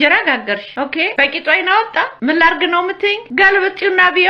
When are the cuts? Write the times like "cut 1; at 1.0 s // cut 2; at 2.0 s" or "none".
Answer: cut 1; at 1.0 s // cut 2; at 2.1 s // cut 3; at 3.2 s